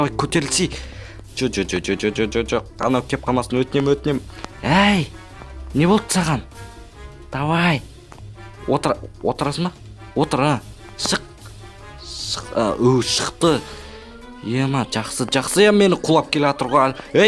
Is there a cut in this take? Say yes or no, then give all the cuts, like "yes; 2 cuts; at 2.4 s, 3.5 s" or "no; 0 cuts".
no; 0 cuts